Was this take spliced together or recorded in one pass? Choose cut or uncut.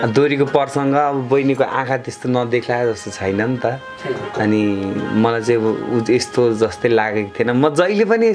uncut